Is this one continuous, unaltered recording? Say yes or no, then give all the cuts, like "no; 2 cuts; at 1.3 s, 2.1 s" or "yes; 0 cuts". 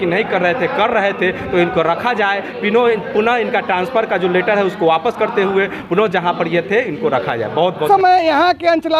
no; 1 cut; at 7.8 s